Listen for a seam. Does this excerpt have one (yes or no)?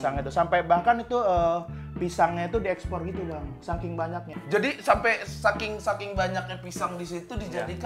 yes